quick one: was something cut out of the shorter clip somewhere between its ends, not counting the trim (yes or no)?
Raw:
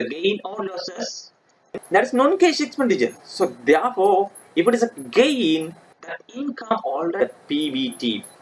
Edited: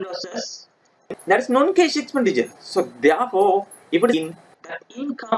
yes